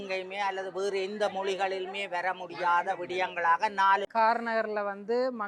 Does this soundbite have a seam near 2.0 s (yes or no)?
no